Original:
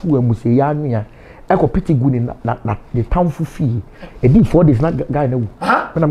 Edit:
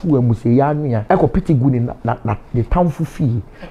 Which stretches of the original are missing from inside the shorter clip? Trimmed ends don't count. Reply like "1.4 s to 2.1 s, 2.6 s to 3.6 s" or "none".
1.0 s to 1.4 s

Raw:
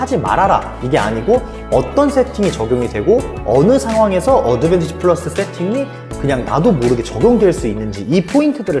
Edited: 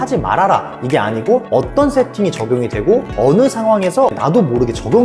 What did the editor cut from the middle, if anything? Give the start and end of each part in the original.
1.5 s to 1.7 s, 3.3 s to 3.4 s, 4.4 s to 6.4 s

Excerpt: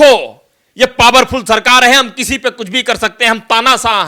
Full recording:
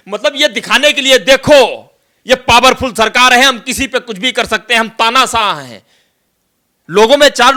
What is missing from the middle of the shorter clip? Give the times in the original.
none

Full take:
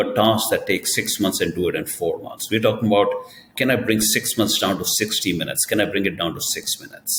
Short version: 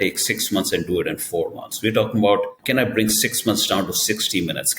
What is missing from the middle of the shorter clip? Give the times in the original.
3.2 s to 3.5 s

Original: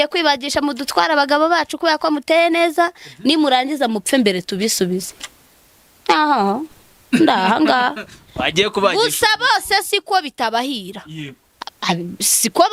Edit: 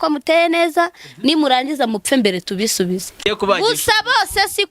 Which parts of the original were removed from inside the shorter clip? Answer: 5.3 s to 8.6 s

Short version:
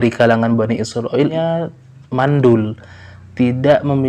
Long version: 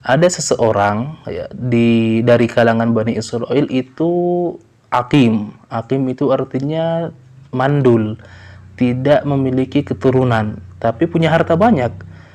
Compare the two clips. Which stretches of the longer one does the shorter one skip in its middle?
3.7 s to 6.7 s

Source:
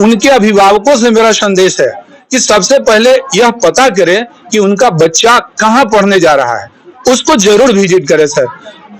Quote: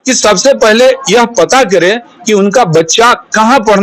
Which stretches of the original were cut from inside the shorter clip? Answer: none

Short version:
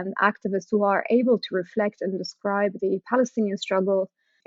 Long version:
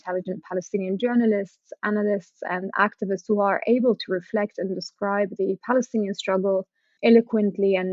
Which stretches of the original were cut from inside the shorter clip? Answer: none

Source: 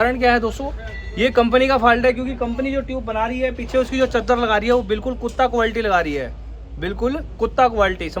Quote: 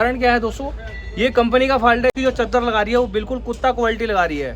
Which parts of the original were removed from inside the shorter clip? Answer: 2.2 s to 3.9 s

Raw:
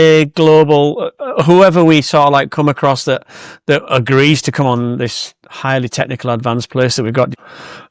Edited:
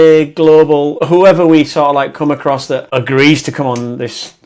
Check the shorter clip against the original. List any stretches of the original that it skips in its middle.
0.9 s to 1.3 s, 3.2 s to 3.9 s

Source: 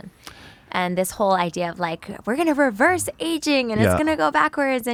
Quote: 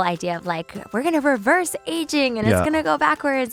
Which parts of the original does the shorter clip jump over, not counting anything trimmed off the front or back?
none

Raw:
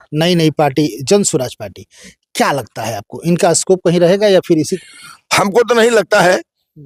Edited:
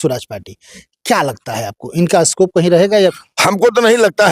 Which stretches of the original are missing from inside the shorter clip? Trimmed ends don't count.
4.4 s to 5.1 s

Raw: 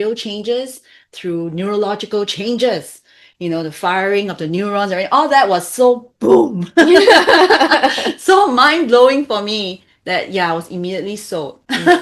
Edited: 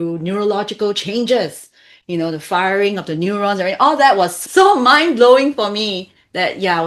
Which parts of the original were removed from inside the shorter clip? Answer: 5.7 s to 8.1 s

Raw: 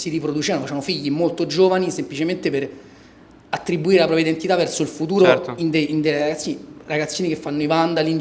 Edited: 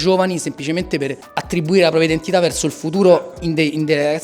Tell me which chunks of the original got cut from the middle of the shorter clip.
2.7 s to 3.4 s

